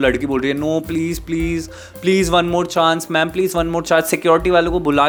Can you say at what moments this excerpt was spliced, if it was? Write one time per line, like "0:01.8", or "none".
none